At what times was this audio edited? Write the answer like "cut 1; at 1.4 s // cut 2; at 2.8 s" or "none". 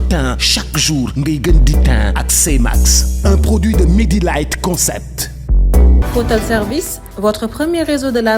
cut 1; at 6.0 s